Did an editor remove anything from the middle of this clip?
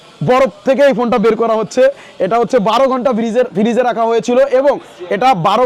no; 0 cuts

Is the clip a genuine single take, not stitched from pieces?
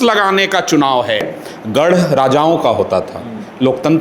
no; 1 cut; at 1.3 s

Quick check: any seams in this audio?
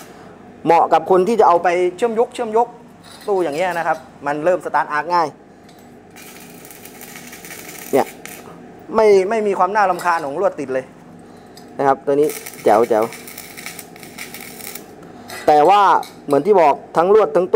no; 0 cuts

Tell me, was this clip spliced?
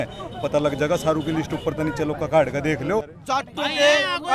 yes; 1 cut; at 3.1 s

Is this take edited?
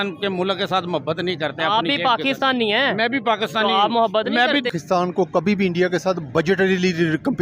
yes; 1 cut; at 4.8 s

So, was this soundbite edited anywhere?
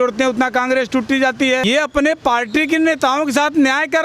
yes; 1 cut; at 1.6 s

